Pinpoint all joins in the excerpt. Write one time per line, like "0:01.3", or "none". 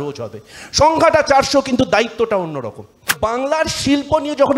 0:03.1